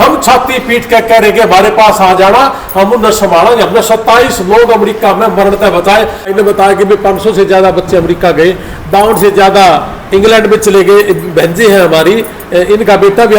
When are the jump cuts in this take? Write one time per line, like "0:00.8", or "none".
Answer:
0:06.3